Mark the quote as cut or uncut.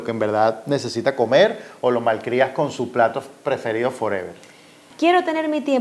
cut